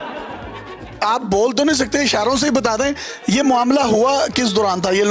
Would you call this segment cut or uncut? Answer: cut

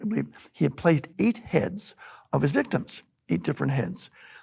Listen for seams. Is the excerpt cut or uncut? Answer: cut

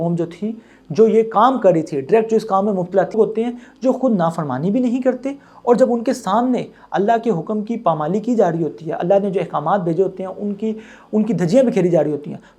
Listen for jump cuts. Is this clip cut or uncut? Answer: cut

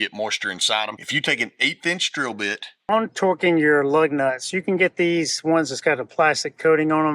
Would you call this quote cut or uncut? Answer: cut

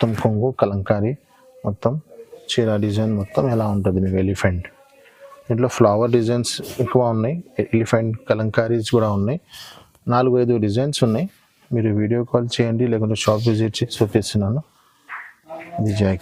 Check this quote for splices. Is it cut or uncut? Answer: uncut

